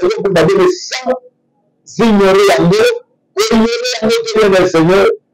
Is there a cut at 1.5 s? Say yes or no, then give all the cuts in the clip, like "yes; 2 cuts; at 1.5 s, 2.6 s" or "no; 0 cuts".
no; 0 cuts